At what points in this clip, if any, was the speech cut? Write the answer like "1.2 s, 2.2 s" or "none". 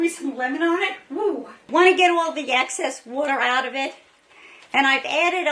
1.6 s